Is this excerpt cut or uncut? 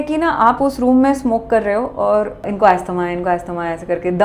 cut